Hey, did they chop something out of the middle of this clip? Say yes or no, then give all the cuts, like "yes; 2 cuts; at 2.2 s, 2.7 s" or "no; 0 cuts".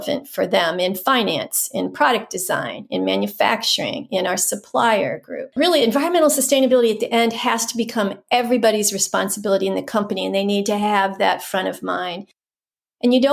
no; 0 cuts